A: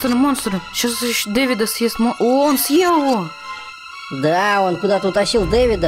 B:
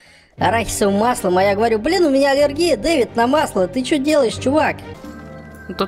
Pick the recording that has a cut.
B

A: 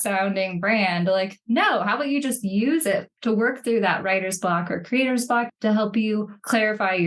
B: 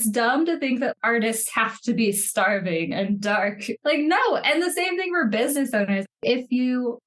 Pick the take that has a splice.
B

